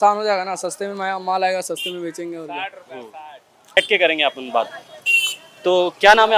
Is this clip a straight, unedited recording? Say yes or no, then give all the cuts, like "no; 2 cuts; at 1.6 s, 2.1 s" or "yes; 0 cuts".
yes; 0 cuts